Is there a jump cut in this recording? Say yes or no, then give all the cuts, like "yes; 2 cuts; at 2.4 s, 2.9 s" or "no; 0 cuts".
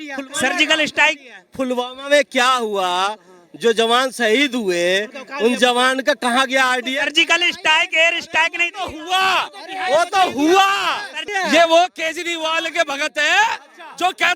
yes; 1 cut; at 11.3 s